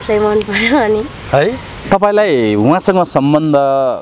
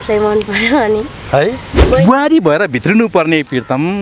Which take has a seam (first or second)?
second